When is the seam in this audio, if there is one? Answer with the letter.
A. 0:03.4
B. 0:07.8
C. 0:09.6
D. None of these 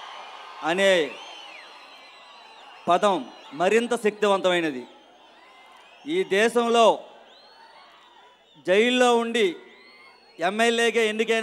D